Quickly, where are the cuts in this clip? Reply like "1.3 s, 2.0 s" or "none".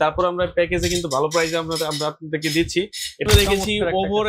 3.3 s